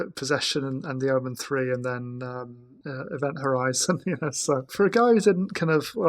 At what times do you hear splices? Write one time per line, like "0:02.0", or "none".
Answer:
0:02.8
0:04.7